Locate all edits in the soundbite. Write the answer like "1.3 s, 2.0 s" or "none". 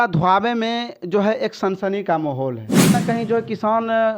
2.9 s

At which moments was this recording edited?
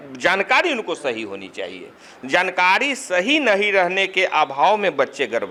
none

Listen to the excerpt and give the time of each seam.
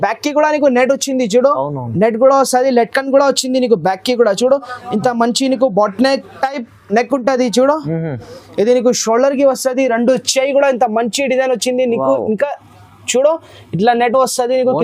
none

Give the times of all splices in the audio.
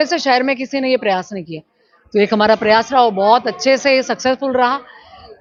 none

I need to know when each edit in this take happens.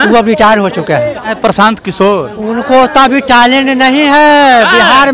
1.3 s

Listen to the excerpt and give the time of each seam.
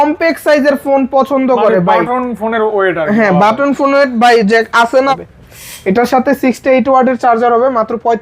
5.1 s

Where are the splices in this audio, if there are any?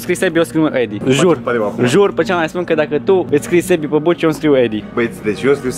1.0 s, 3.3 s

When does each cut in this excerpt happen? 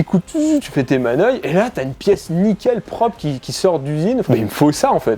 4.3 s

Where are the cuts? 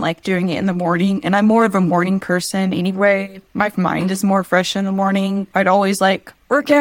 5.5 s

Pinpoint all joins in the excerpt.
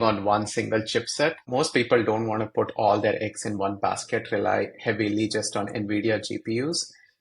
1.4 s

